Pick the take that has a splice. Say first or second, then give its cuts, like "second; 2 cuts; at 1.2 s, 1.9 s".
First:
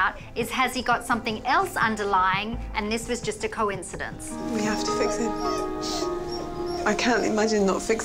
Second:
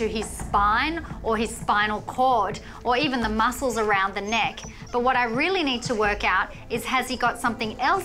first; 1 cut; at 4.3 s